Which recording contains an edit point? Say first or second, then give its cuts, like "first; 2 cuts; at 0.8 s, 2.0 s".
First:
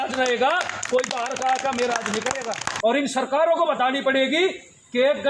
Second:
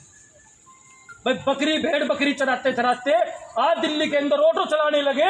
first; 1 cut; at 2.7 s